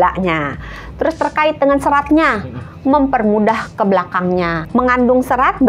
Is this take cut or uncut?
cut